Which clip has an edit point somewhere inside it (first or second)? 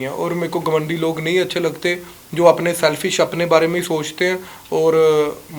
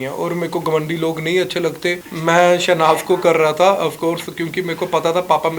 second